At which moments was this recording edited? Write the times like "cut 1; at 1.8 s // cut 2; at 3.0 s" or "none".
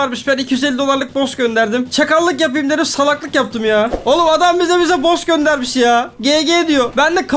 cut 1; at 4.0 s